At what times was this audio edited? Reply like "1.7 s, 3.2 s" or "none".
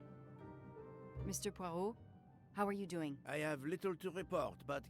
1.2 s